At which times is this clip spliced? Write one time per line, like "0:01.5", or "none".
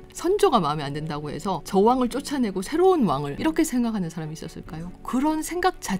0:01.6
0:03.4
0:04.8